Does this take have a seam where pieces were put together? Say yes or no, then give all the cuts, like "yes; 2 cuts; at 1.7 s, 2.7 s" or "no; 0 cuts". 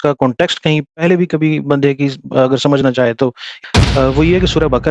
yes; 1 cut; at 3.5 s